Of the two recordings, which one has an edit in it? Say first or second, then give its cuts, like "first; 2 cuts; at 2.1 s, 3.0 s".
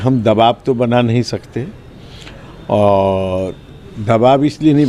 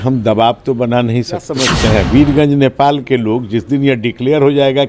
second; 1 cut; at 1.6 s